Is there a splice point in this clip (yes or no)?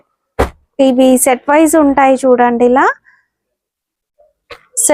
no